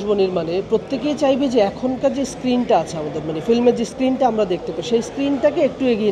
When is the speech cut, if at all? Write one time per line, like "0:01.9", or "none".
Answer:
none

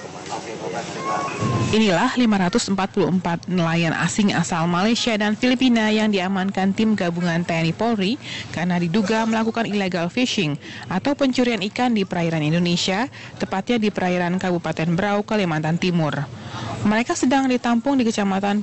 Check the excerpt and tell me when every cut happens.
0:01.1

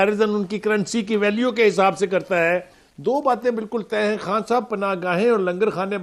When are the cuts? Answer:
0:02.9

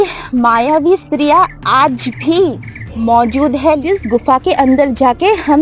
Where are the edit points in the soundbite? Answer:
0:03.8

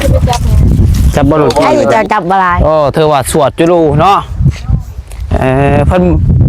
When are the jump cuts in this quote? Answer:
0:01.8

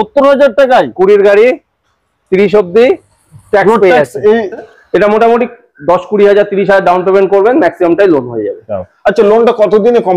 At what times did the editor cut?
0:04.6

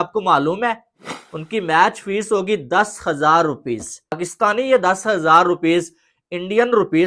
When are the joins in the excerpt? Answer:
0:04.2

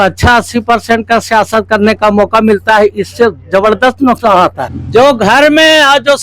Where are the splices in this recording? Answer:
0:04.7

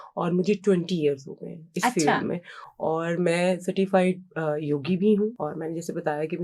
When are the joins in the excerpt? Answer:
0:05.4

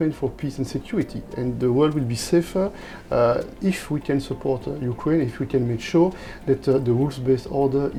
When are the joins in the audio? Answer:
none

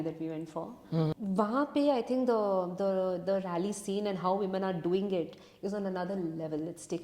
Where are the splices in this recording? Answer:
0:01.1

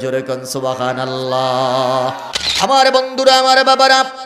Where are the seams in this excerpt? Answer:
0:02.3

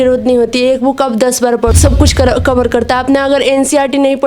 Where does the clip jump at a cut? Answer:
0:01.7

